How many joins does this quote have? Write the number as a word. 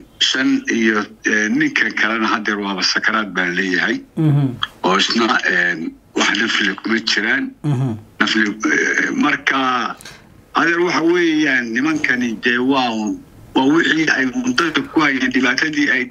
zero